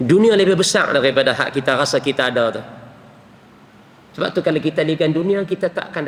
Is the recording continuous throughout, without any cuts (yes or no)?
yes